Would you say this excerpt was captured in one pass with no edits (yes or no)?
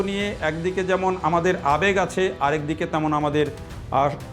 yes